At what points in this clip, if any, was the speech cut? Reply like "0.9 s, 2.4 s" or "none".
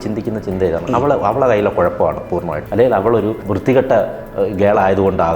2.6 s, 3.5 s